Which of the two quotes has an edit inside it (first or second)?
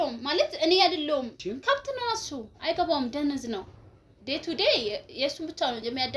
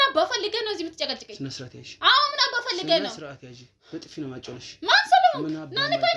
first